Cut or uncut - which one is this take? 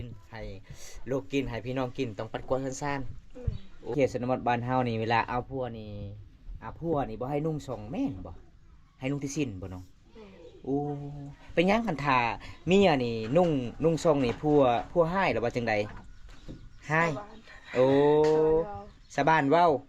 cut